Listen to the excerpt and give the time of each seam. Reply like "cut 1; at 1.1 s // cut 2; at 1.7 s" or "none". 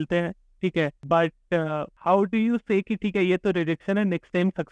cut 1; at 1.0 s // cut 2; at 1.9 s